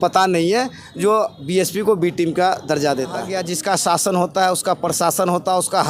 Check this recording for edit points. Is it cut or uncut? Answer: cut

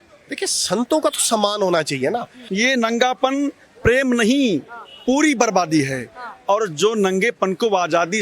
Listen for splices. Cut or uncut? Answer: cut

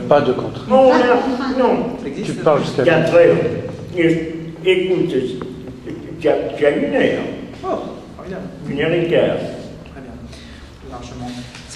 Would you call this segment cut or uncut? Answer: uncut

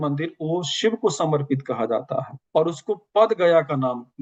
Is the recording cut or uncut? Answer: uncut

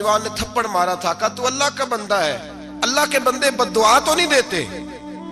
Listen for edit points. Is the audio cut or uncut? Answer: uncut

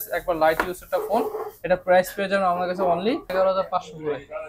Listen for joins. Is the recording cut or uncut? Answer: cut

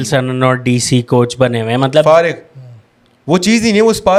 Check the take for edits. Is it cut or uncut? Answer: uncut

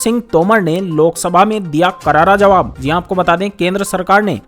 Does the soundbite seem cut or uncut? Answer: uncut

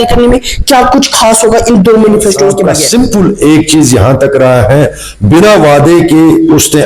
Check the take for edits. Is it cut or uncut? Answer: cut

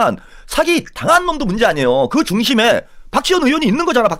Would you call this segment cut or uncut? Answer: uncut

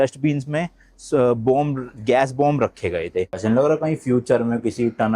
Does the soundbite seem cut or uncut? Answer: cut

